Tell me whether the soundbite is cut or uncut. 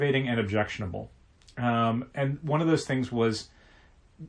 uncut